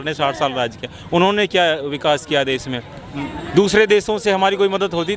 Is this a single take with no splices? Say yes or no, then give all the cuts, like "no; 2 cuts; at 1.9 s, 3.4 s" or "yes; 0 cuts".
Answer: yes; 0 cuts